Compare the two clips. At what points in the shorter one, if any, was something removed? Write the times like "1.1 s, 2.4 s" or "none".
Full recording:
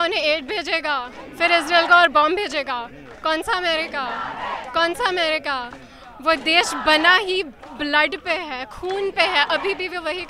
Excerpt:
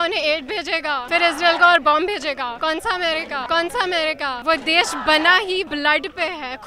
1.0 s, 2.6 s, 3.4 s, 4.4 s, 5.7 s